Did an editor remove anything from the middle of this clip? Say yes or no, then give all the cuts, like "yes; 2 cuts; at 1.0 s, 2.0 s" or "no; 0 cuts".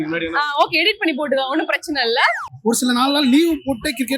yes; 1 cut; at 2.5 s